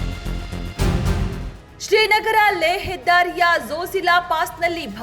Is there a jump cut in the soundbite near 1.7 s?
yes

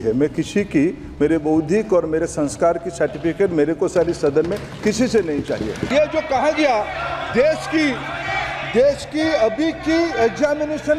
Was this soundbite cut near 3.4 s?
no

